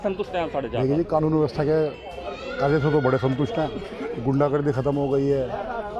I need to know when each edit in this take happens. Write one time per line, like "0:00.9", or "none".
none